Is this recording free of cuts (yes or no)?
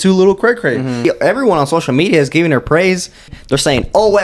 no